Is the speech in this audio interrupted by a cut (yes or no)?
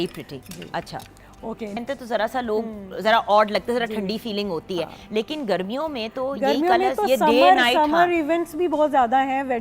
yes